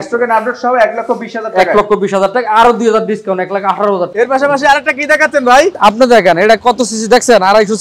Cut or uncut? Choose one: cut